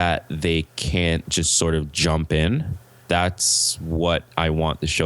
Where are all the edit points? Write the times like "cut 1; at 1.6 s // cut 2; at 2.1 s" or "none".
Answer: cut 1; at 1.3 s